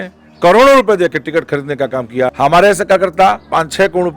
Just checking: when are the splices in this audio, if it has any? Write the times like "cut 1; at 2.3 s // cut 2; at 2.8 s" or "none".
cut 1; at 2.3 s